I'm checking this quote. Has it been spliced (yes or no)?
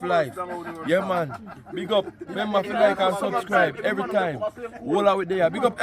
yes